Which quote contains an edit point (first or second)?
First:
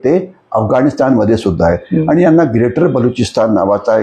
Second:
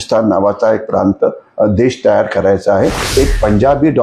second